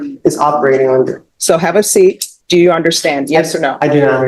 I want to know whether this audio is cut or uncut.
cut